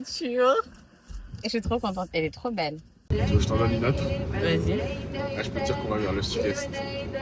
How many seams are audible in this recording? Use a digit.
1